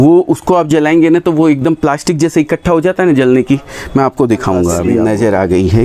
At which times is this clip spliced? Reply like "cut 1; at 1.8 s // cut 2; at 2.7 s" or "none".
cut 1; at 4.8 s